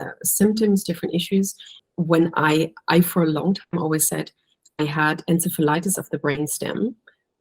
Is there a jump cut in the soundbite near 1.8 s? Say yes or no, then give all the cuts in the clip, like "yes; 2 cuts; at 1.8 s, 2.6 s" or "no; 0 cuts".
yes; 1 cut; at 1.8 s